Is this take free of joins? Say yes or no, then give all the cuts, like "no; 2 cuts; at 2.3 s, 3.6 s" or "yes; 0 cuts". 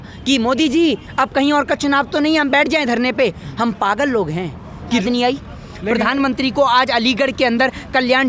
no; 1 cut; at 5.0 s